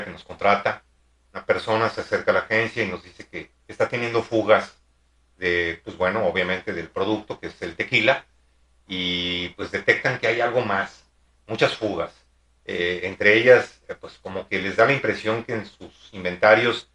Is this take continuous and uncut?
yes; 0 cuts

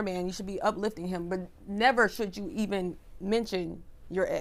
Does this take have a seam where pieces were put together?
no; 0 cuts

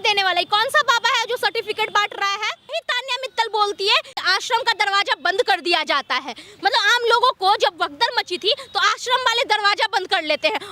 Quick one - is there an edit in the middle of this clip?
yes; 2 cuts; at 2.8 s, 4.1 s

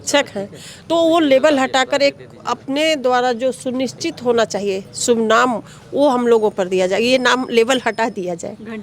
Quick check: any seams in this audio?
no; 0 cuts

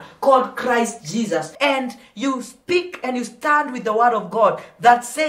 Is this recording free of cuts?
no; 1 cut; at 1.5 s

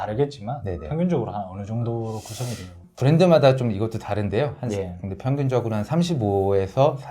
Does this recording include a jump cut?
yes; 1 cut; at 2.9 s

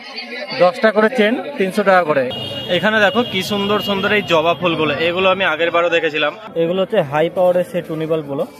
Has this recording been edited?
yes; 2 cuts; at 2.3 s, 6.4 s

